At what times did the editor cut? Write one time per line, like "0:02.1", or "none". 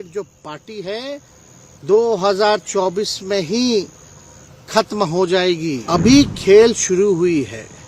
0:05.8